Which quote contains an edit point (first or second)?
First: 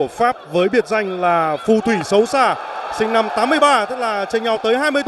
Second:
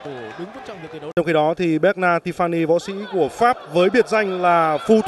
second